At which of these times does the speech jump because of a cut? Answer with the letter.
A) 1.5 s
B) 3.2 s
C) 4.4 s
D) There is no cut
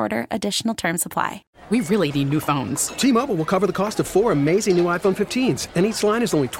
A